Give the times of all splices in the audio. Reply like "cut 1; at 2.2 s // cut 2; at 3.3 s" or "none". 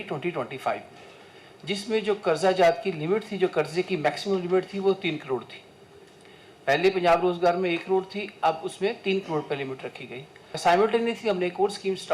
cut 1; at 10.6 s